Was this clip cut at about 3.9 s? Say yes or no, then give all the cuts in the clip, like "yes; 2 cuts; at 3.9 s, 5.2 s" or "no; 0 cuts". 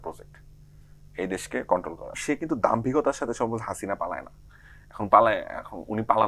no; 1 cut; at 2.2 s